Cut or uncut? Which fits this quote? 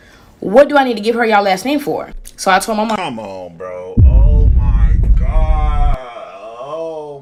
uncut